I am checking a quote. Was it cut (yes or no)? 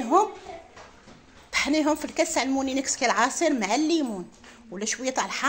no